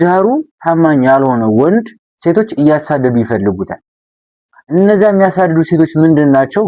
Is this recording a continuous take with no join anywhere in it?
yes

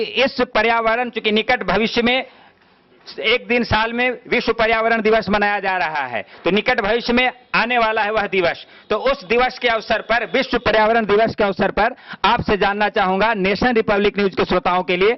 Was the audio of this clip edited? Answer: no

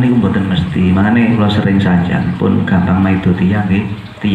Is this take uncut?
no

